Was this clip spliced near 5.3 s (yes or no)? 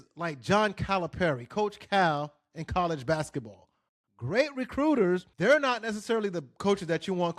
yes